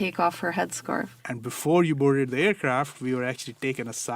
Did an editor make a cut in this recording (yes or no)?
yes